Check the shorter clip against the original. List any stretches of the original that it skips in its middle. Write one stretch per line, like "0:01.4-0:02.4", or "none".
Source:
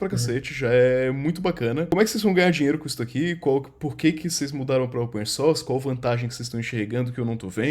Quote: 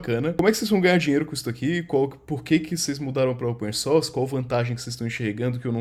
none